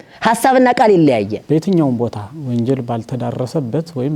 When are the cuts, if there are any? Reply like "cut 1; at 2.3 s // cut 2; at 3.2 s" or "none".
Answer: cut 1; at 1.3 s